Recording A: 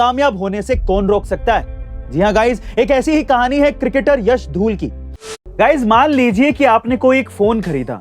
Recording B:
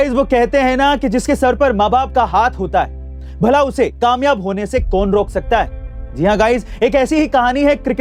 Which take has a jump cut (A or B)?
A